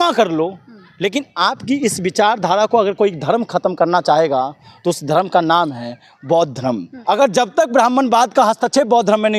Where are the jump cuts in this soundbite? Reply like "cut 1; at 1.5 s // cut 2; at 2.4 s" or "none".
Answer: cut 1; at 6.9 s